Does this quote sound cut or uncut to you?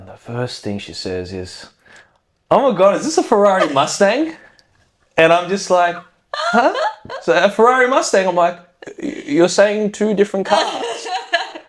uncut